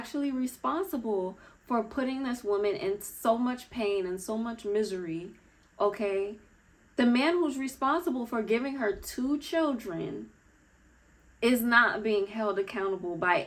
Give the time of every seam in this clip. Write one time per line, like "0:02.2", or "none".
none